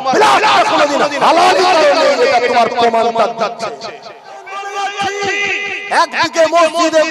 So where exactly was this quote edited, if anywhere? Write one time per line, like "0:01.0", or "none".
0:04.6